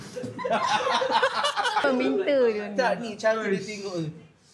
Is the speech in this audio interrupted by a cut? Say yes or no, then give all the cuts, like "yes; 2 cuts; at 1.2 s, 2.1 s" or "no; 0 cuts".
yes; 1 cut; at 1.8 s